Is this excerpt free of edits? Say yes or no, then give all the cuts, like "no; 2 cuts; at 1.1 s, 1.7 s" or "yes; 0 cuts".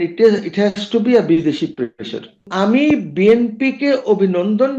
no; 1 cut; at 2.4 s